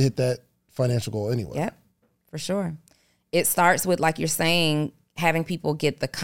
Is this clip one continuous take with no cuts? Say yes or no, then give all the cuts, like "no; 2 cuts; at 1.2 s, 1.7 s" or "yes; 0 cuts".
yes; 0 cuts